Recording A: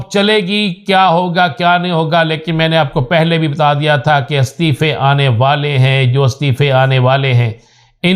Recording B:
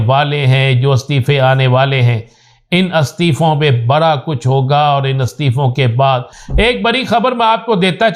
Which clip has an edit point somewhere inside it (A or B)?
B